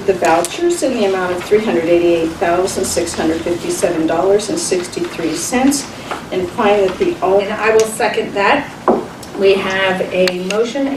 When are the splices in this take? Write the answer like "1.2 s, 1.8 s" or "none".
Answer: none